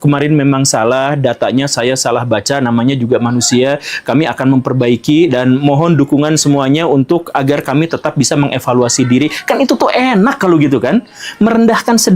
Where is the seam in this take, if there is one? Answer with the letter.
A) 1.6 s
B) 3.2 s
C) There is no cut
C